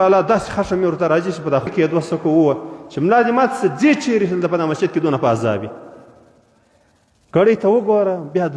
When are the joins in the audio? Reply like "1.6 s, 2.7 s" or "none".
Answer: 1.7 s